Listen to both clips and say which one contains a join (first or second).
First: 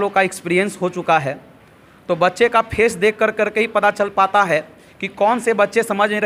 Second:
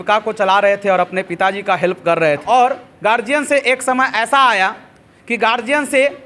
second